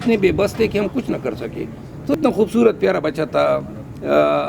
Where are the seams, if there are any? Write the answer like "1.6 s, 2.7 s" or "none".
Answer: 2.2 s